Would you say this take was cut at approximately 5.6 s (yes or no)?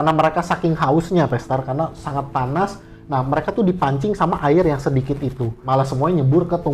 yes